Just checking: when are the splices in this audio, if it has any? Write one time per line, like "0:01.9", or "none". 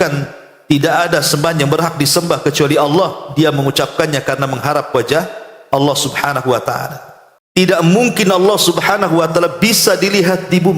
0:07.2